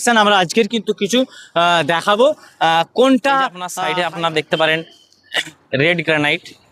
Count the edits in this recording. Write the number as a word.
one